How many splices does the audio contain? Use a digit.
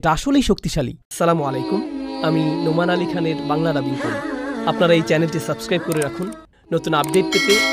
1